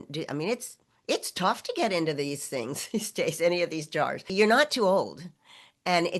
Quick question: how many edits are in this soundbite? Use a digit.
1